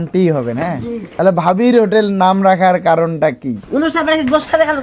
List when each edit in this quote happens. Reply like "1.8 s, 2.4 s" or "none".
3.6 s